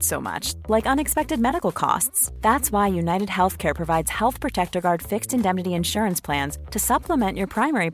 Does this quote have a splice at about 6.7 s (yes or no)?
no